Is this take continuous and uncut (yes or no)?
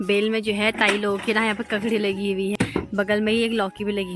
no